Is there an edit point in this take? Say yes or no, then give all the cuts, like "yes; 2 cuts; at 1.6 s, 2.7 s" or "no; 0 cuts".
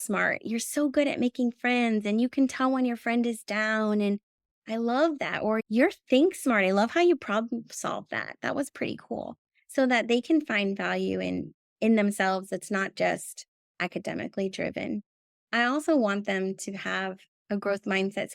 yes; 2 cuts; at 5.6 s, 15.4 s